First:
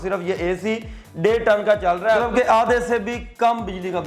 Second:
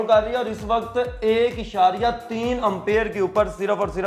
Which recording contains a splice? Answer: first; 1 cut; at 2.2 s

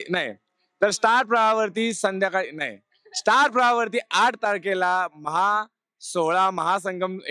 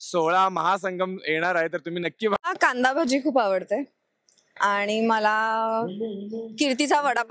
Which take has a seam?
second; 1 cut; at 2.4 s

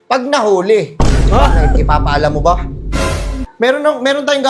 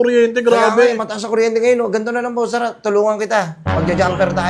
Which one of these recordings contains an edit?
first; 1 cut; at 3.4 s

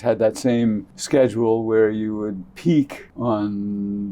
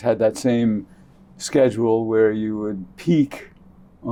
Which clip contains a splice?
first; 2 cuts; at 0.9 s, 3.0 s

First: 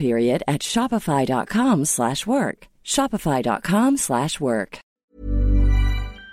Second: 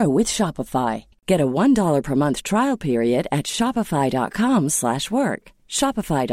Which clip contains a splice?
first; 1 cut; at 5.0 s

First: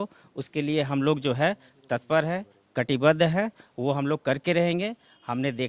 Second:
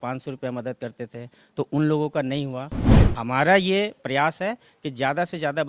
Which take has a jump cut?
second; 1 cut; at 2.8 s

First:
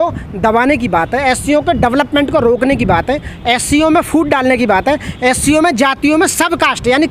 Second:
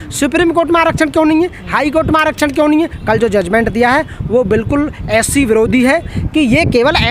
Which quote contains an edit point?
second; 2 cuts; at 3.0 s, 6.2 s

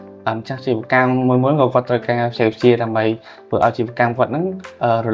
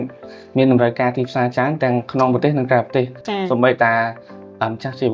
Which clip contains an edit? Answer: second; 1 cut; at 3.2 s

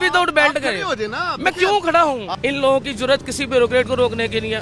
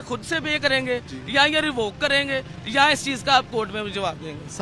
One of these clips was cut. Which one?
first; 1 cut; at 2.3 s

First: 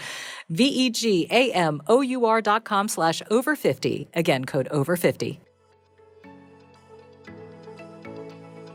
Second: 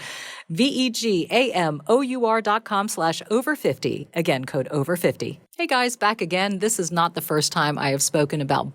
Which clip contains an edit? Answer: second; 1 cut; at 5.4 s

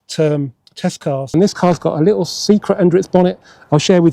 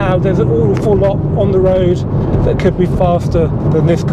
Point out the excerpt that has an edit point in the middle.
first; 1 cut; at 1.3 s

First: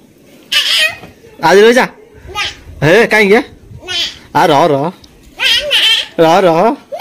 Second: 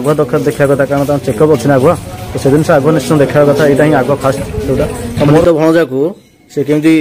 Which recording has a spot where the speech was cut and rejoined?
second; 1 cut; at 5.4 s

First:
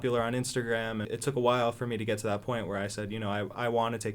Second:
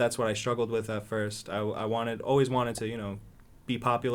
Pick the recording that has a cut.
first; 1 cut; at 1.1 s

